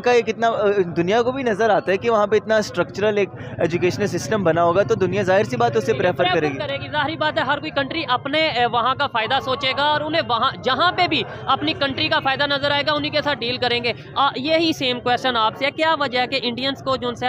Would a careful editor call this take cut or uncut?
uncut